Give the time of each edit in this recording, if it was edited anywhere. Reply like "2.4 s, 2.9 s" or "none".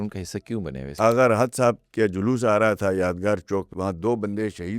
0.9 s, 3.7 s